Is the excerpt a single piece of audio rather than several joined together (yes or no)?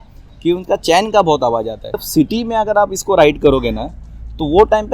no